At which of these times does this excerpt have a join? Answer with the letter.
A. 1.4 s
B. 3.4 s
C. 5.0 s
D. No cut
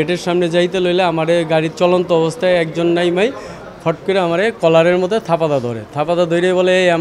D